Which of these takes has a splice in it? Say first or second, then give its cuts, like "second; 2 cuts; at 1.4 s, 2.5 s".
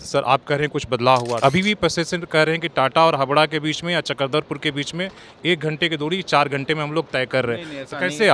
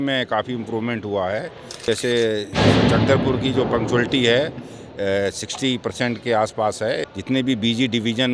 second; 2 cuts; at 1.9 s, 7.1 s